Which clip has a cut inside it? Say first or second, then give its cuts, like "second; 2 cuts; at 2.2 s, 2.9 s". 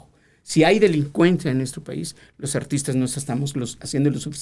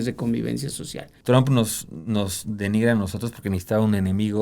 second; 1 cut; at 1.1 s